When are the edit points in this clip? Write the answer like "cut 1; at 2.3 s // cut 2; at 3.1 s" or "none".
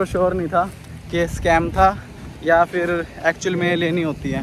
none